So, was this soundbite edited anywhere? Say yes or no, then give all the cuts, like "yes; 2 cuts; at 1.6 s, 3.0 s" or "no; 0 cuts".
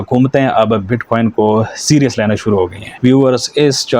yes; 1 cut; at 2.8 s